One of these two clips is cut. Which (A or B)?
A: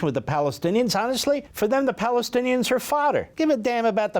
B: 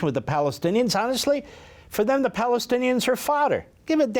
A